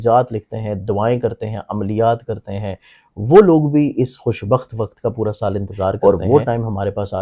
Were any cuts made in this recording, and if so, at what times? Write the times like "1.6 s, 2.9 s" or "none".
6.0 s